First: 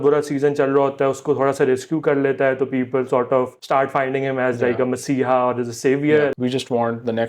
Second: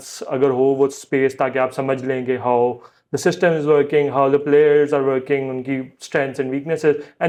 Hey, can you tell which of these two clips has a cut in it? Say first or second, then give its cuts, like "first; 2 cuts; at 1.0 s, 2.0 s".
first; 2 cuts; at 3.6 s, 6.3 s